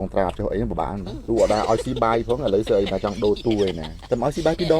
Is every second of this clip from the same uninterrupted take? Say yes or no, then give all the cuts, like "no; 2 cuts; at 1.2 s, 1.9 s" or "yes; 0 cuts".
no; 2 cuts; at 1.1 s, 3.9 s